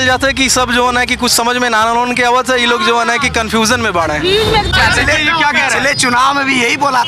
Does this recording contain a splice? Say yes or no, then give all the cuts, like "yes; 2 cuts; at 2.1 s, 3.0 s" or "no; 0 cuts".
yes; 1 cut; at 4.7 s